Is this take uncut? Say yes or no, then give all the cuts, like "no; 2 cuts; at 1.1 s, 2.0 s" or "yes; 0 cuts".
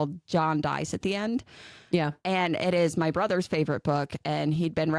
yes; 0 cuts